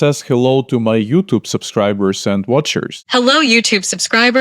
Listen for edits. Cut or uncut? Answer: cut